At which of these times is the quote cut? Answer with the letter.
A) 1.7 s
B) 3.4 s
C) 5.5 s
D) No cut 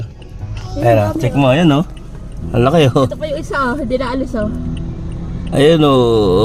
D